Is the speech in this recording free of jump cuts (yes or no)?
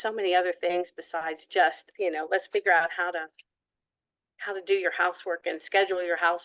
no